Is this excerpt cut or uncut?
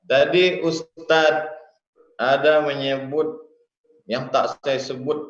cut